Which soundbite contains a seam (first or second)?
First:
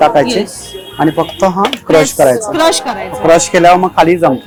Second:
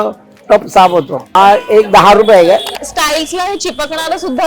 second